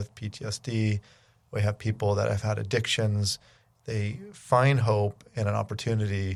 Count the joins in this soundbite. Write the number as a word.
zero